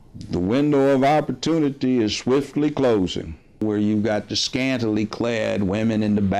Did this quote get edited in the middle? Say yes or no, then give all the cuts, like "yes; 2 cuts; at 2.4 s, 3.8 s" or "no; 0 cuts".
yes; 1 cut; at 3.6 s